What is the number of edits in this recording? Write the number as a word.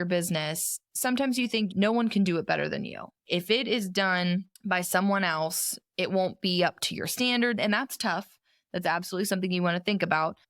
one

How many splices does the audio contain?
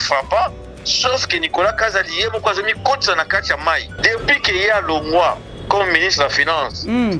one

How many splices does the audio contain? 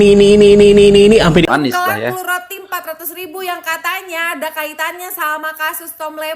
one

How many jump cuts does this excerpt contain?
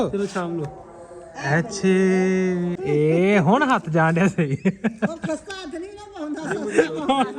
one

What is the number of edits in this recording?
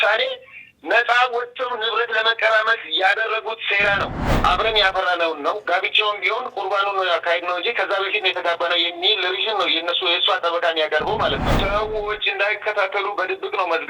two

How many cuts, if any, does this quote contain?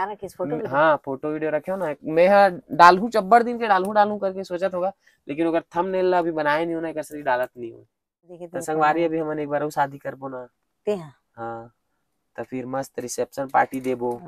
one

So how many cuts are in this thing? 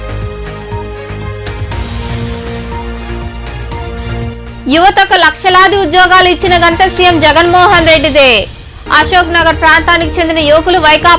one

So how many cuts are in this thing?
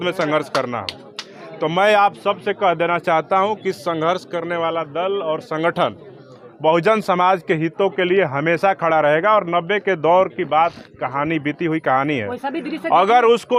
zero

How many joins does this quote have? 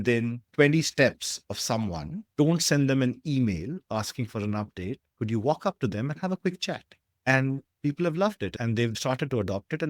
zero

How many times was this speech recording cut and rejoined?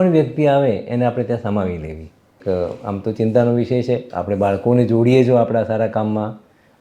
one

